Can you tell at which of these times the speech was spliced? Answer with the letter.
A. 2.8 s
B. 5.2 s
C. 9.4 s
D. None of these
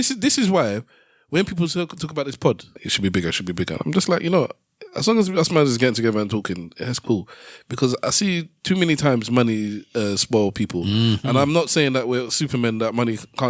A